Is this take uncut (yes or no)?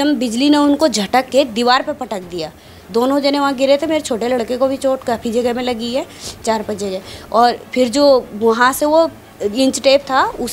yes